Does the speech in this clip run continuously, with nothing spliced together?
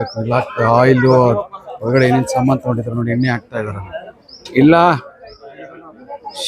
yes; 0 cuts

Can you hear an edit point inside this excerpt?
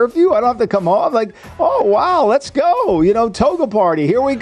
no; 0 cuts

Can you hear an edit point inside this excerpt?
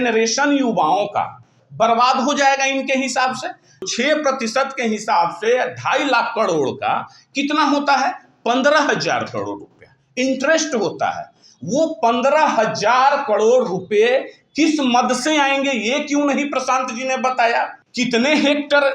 yes; 2 cuts; at 3.9 s, 17.8 s

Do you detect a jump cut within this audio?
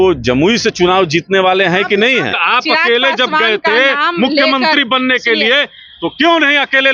yes; 1 cut; at 2.4 s

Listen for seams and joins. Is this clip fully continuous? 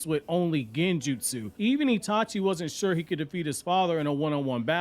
no; 1 cut; at 3.0 s

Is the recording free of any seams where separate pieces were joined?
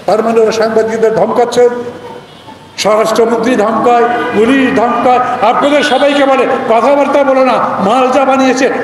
yes; 0 cuts

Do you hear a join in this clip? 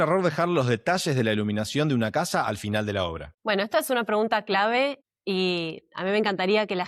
yes; 1 cut; at 5.1 s

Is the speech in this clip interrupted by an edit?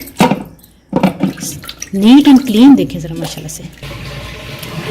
yes; 1 cut; at 3.8 s

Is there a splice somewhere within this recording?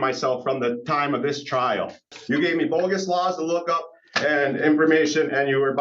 yes; 1 cut; at 2.1 s

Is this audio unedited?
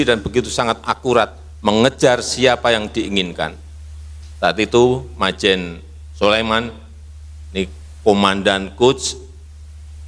yes; 0 cuts

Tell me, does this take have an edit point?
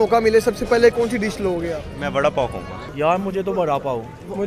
yes; 1 cut; at 0.9 s

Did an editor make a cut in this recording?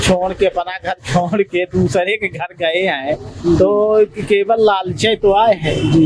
no; 0 cuts

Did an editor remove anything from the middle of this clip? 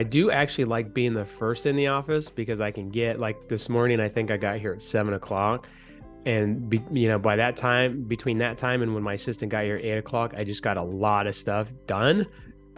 no; 0 cuts

